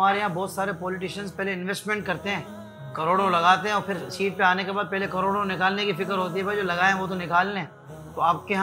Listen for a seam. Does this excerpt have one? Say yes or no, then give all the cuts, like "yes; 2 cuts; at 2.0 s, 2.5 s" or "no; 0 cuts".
no; 0 cuts